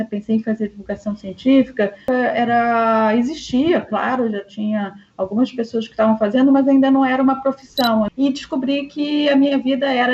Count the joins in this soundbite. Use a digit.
2